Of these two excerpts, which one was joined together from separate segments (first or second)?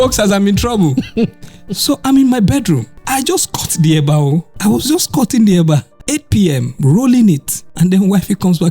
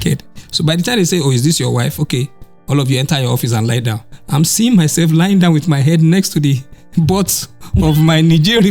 first